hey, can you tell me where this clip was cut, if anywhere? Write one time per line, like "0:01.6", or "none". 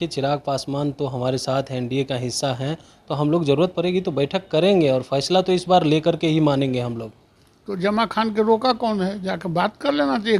none